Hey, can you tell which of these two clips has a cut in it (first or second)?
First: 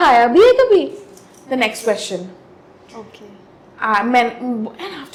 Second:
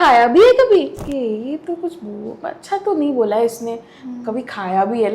second